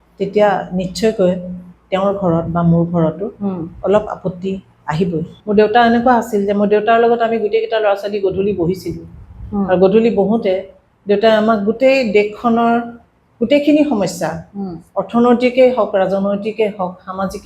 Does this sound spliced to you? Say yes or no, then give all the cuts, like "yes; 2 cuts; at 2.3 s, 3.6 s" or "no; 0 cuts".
yes; 1 cut; at 5.4 s